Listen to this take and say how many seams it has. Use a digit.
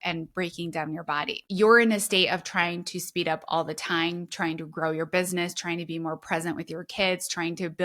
1